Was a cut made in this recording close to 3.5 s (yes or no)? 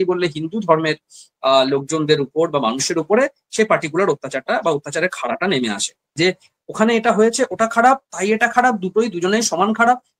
no